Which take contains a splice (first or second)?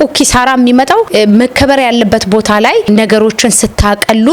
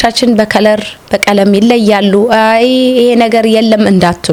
first